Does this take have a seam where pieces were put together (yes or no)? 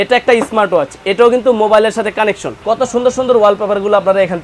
yes